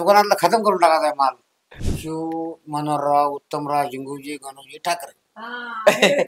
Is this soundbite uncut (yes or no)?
no